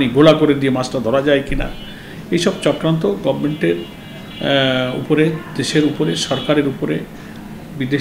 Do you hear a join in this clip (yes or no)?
no